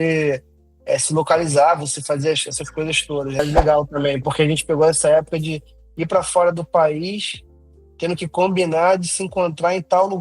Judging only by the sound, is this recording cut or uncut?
cut